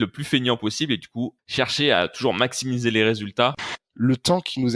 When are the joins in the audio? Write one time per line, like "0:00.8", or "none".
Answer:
0:01.4
0:03.6